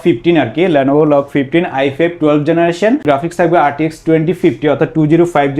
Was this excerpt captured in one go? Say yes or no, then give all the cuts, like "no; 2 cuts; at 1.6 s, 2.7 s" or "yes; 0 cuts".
no; 1 cut; at 3.0 s